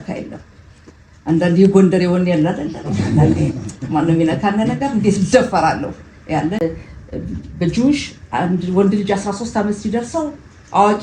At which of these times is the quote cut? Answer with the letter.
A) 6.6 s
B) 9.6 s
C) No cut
A